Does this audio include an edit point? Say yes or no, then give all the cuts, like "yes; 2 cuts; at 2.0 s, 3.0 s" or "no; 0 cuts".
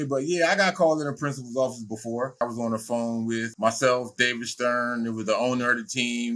yes; 2 cuts; at 2.4 s, 3.5 s